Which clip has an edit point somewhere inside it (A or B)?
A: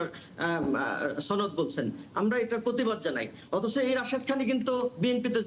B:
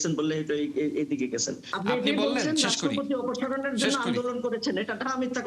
B